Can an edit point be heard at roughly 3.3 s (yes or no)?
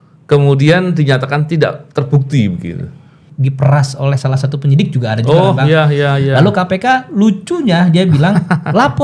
yes